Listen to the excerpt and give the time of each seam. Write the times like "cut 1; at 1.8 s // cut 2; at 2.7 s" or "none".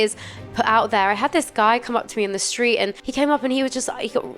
cut 1; at 3.0 s